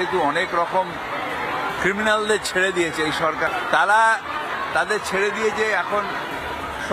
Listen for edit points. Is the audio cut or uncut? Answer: cut